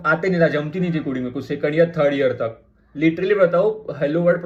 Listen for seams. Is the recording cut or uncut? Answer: uncut